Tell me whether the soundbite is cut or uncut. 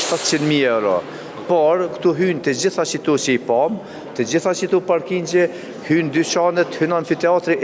uncut